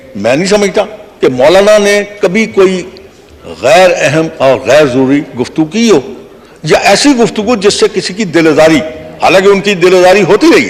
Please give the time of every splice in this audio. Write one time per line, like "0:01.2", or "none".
none